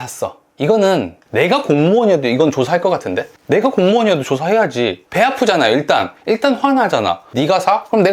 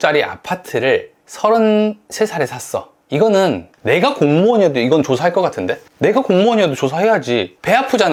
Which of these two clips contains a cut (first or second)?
first